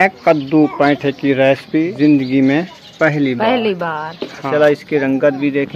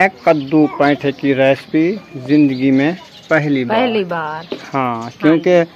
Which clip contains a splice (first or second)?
first